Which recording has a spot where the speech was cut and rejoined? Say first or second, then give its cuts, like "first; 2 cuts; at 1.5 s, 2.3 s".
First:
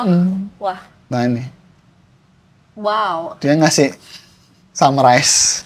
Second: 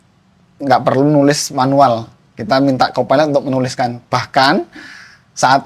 first; 1 cut; at 0.9 s